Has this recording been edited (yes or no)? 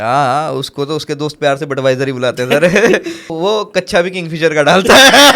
yes